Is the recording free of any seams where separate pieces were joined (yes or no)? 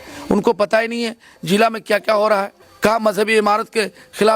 no